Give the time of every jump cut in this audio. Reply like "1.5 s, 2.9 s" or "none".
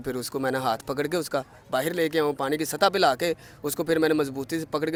none